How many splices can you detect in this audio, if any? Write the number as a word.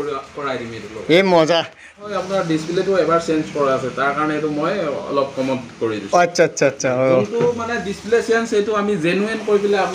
one